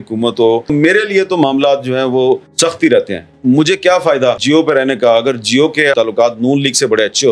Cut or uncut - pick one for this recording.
cut